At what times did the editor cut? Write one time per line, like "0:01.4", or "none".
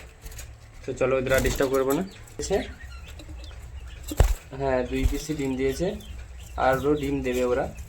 0:02.4

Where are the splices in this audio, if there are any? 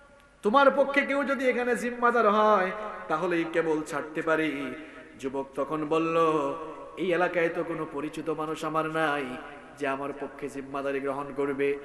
none

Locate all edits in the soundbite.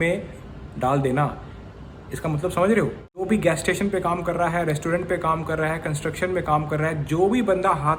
0:03.3

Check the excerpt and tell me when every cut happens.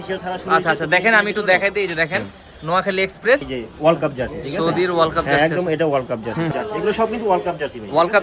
0:03.5
0:06.5

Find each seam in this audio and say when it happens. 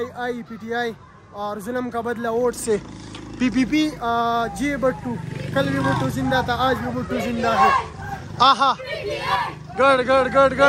none

